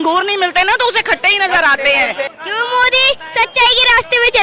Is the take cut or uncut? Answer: cut